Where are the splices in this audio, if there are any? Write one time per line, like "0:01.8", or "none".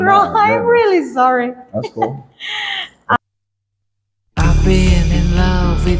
0:03.1